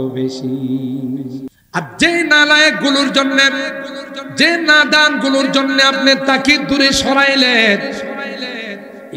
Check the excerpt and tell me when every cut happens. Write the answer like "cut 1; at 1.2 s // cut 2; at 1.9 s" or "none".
cut 1; at 1.6 s

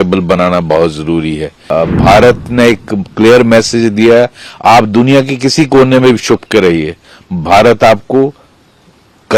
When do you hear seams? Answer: cut 1; at 1.7 s

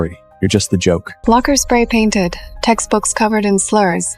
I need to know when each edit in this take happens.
cut 1; at 1.1 s

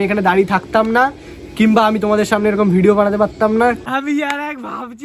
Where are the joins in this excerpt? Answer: cut 1; at 3.8 s

